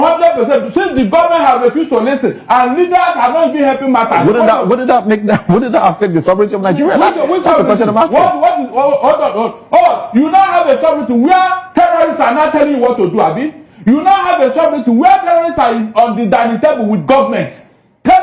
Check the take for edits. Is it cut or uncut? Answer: uncut